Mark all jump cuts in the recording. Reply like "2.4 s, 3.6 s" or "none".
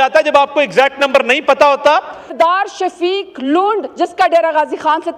2.3 s